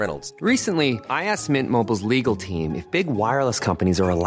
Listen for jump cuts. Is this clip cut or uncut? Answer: uncut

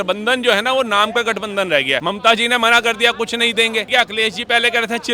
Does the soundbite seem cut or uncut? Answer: cut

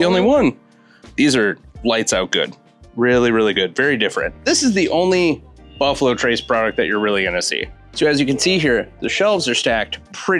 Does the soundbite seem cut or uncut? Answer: cut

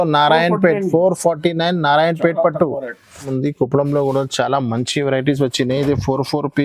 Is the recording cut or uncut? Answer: cut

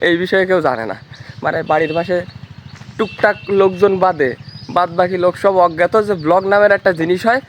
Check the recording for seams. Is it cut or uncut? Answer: uncut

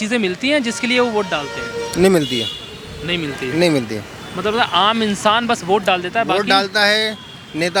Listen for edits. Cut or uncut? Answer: uncut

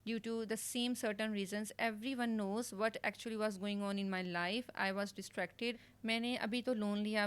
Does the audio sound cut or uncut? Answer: cut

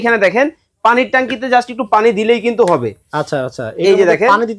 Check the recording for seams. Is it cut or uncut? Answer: uncut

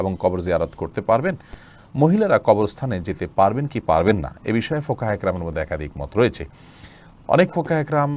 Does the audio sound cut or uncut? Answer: uncut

